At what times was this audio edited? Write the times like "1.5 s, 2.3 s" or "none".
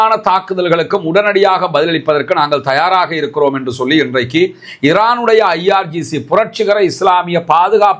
none